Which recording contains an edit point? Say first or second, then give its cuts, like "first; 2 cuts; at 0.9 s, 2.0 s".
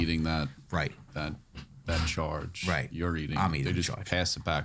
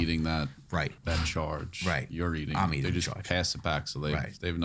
second; 1 cut; at 1.0 s